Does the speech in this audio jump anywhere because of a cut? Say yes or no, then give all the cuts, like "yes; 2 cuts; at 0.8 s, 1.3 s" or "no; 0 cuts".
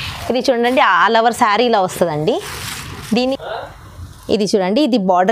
yes; 1 cut; at 3.3 s